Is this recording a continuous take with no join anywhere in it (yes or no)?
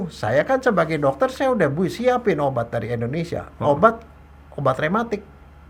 yes